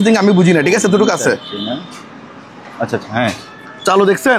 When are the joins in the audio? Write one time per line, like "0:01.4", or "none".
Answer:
none